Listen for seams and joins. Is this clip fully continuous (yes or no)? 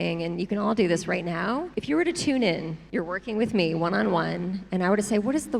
no